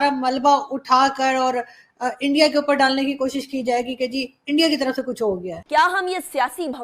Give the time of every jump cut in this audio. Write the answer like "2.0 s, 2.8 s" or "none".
5.5 s